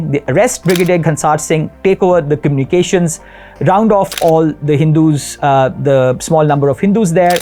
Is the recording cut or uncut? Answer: uncut